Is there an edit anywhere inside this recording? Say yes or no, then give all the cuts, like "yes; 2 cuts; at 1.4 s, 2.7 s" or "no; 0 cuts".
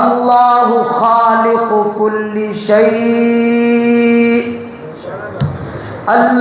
no; 0 cuts